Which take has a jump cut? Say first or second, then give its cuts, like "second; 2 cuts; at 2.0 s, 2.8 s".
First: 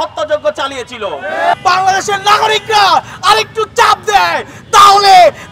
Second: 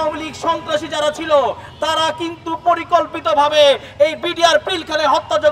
first; 1 cut; at 1.5 s